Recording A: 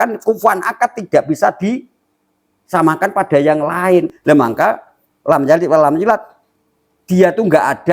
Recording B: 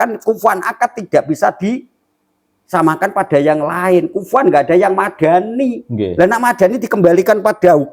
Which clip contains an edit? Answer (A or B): A